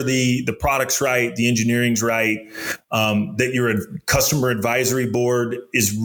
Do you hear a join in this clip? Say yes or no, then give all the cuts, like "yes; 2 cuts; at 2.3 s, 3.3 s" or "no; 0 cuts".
no; 0 cuts